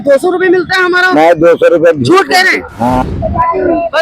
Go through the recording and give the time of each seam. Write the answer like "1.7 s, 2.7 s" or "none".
3.0 s

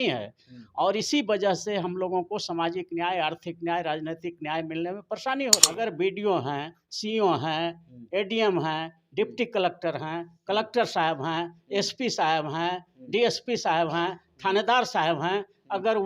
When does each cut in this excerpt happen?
5.7 s

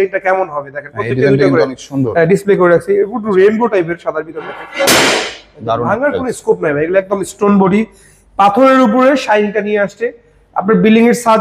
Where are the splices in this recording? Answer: 4.6 s

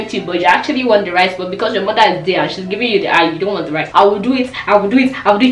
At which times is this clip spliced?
3.8 s

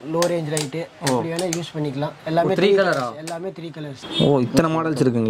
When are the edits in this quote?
4.0 s

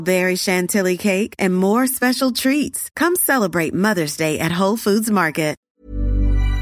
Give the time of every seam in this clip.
5.6 s

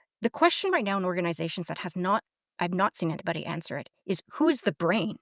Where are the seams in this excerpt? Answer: none

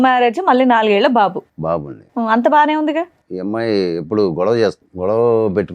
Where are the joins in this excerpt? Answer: 3.2 s, 4.9 s

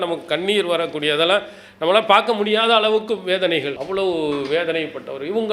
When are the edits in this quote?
3.8 s

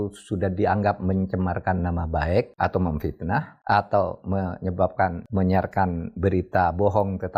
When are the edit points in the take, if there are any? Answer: 2.5 s, 3.5 s, 5.2 s

